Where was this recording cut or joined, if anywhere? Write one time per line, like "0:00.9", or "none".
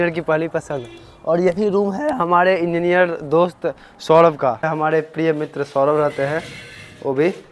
0:04.7